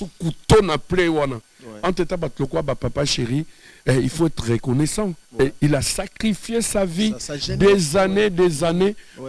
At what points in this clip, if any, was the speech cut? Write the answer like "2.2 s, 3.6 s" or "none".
none